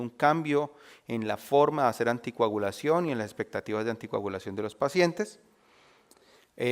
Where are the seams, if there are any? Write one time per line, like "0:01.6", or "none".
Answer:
0:01.0